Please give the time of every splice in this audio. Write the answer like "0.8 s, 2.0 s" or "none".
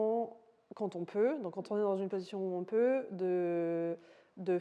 none

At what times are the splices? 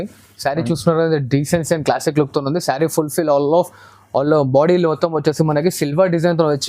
none

